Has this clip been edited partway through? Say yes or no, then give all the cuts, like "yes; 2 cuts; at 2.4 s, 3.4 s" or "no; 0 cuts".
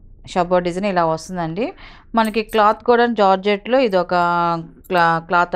no; 0 cuts